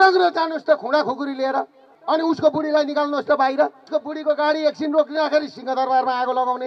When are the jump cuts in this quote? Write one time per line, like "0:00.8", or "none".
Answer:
0:02.0
0:03.8